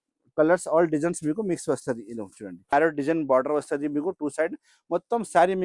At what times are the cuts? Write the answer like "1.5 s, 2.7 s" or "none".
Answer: 2.7 s